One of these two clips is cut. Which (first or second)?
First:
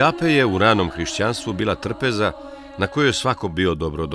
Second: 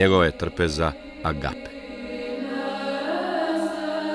second